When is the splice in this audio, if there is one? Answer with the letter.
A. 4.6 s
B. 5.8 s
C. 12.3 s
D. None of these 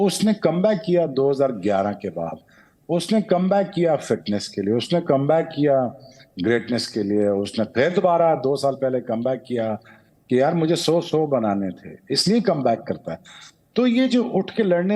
D